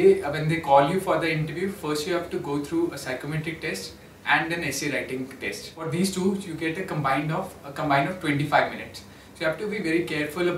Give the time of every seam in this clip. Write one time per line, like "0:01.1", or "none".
0:05.8